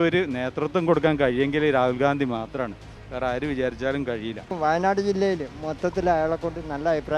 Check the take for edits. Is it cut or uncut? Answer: cut